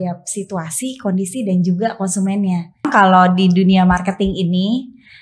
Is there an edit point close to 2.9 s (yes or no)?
yes